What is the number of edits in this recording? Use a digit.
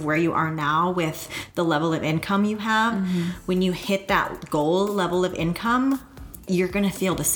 1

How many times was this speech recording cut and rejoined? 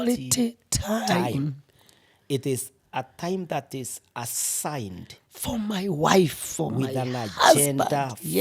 0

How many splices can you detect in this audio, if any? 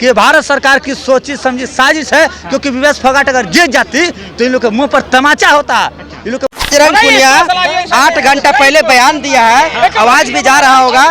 1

